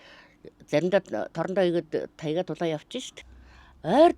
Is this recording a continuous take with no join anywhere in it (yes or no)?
no